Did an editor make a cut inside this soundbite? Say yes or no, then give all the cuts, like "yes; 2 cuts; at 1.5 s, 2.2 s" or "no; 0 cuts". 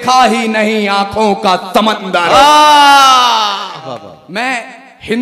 no; 0 cuts